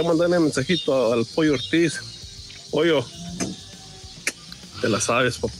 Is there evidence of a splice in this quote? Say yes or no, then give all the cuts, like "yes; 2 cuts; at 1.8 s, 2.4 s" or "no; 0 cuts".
no; 0 cuts